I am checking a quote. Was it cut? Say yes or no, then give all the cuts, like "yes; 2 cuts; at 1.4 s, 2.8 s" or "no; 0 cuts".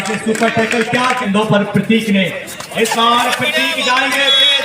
yes; 1 cut; at 1.2 s